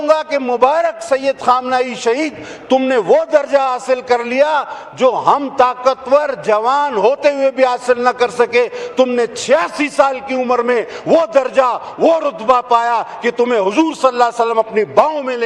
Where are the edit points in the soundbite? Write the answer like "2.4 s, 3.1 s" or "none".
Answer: none

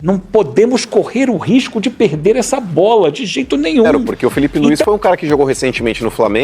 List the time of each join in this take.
3.9 s

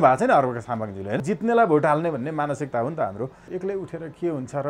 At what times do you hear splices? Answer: 1.2 s, 3.5 s

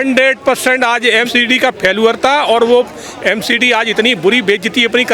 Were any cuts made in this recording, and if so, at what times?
1.3 s

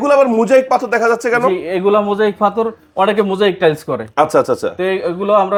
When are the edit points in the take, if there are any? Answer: none

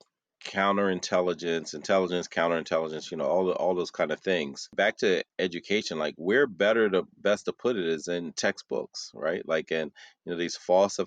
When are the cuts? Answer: 4.7 s

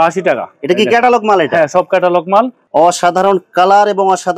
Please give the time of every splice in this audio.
2.6 s

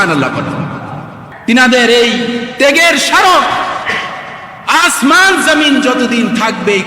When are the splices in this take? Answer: 1.2 s

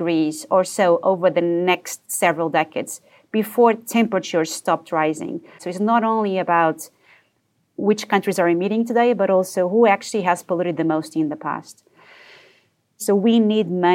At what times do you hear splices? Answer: 5.6 s, 7.8 s, 13.0 s

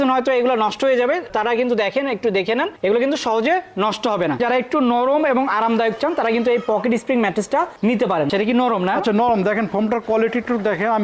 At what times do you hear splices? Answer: 4.4 s, 8.3 s

